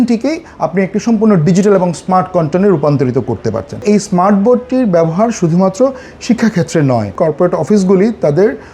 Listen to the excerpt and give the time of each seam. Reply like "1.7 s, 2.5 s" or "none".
3.8 s, 7.1 s